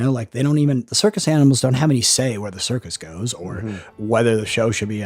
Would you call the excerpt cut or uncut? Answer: cut